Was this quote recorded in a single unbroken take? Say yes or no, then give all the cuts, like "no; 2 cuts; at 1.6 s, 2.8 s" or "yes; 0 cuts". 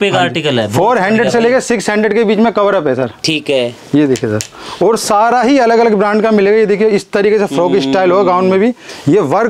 yes; 0 cuts